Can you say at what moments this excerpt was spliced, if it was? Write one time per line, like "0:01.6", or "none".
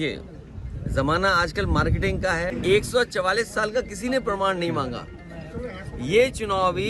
0:02.5